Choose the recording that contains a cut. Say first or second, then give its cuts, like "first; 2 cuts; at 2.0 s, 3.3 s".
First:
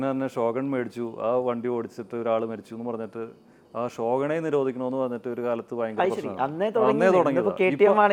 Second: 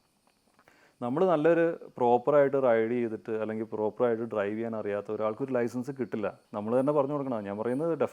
second; 1 cut; at 6.4 s